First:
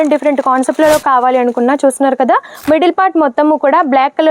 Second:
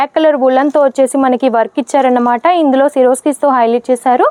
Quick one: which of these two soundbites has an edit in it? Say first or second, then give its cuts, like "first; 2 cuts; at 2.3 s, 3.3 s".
first; 1 cut; at 2.5 s